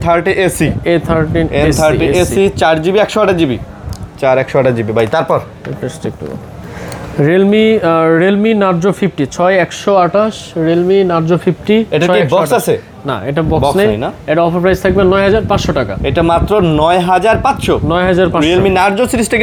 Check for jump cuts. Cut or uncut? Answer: uncut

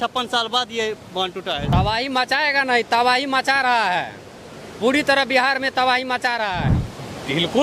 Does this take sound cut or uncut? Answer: cut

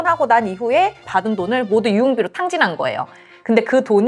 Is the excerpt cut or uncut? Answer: cut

